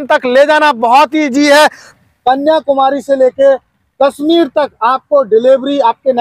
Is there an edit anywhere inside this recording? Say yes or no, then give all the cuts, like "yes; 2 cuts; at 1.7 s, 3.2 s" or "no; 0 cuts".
yes; 1 cut; at 1.9 s